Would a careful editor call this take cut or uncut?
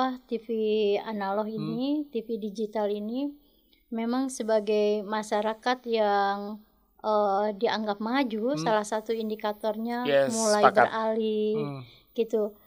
uncut